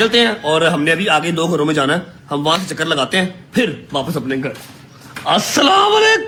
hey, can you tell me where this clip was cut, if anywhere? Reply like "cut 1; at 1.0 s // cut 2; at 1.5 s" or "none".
none